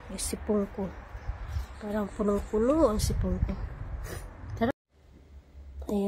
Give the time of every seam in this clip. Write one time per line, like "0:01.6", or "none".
0:04.7

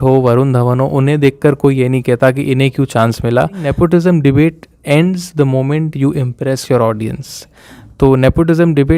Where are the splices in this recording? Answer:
0:03.7

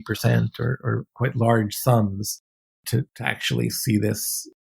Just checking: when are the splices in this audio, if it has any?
0:01.1
0:02.9

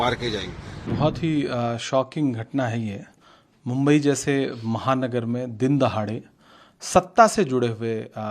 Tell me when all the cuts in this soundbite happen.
0:00.9

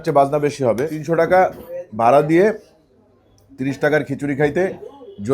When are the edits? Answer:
0:01.0

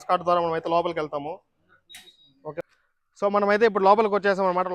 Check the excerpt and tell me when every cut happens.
0:02.6

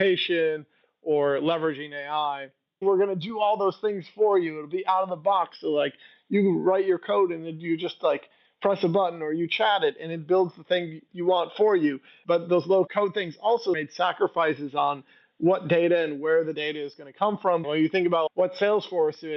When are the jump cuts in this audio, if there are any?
0:02.8
0:12.1
0:17.6

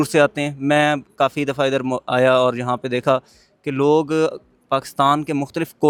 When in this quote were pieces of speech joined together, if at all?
none

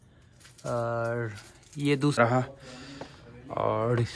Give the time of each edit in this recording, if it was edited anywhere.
0:02.2

